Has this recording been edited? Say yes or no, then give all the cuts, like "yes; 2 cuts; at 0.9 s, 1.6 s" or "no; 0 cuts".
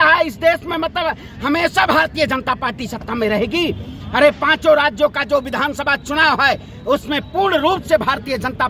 no; 0 cuts